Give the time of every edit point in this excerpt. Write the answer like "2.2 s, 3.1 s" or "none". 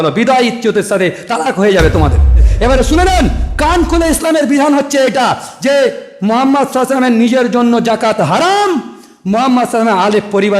2.5 s